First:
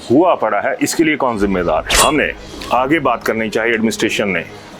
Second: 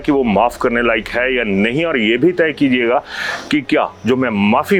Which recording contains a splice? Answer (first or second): first